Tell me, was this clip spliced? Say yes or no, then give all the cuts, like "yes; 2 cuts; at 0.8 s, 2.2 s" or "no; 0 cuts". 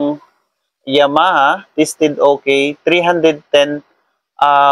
no; 0 cuts